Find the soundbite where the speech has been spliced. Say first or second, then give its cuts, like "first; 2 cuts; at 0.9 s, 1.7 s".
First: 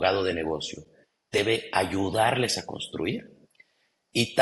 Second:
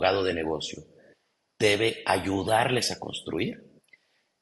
first; 1 cut; at 1.4 s